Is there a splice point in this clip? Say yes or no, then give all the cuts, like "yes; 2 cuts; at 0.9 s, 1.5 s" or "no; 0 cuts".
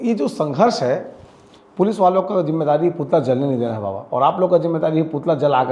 no; 0 cuts